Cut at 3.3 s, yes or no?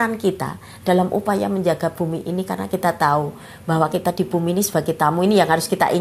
no